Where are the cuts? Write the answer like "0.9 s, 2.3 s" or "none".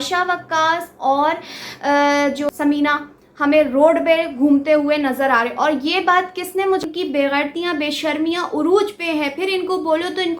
2.5 s, 6.8 s

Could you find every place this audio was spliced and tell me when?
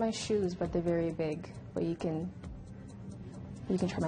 none

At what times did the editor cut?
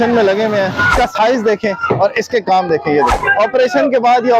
0.9 s, 3.1 s

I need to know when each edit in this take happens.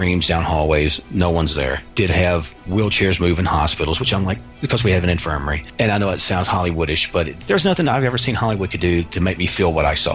1.8 s, 2.6 s, 5.6 s, 7.4 s

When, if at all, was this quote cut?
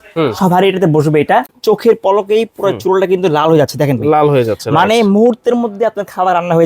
1.5 s

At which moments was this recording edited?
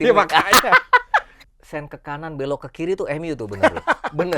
1.4 s

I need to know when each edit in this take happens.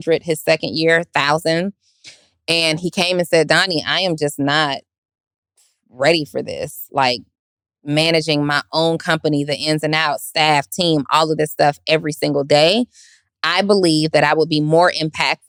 none

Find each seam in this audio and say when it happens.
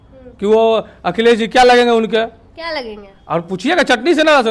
none

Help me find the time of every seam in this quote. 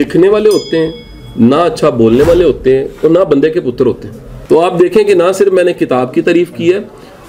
4.3 s

